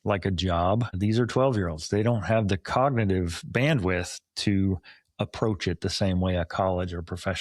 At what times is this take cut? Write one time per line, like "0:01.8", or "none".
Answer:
0:00.9